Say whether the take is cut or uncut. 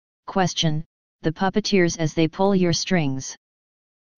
cut